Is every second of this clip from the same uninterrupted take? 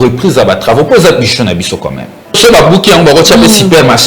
no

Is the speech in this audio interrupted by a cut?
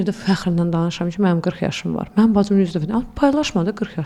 no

